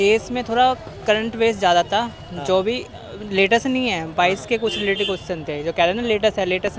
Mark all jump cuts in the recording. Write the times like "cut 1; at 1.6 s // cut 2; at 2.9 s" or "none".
none